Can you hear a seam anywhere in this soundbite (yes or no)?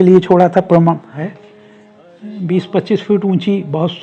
yes